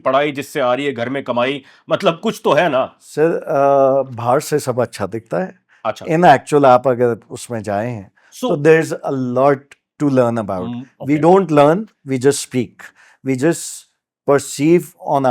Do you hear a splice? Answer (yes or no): no